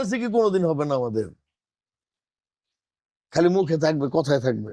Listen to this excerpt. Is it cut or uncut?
uncut